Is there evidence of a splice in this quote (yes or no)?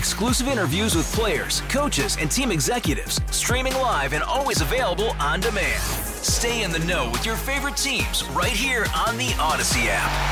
no